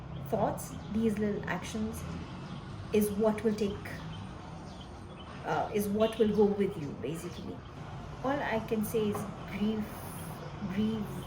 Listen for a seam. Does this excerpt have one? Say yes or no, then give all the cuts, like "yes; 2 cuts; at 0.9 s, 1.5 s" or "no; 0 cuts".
yes; 1 cut; at 7.8 s